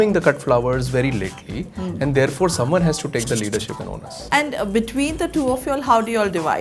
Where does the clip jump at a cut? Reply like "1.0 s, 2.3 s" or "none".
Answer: 4.1 s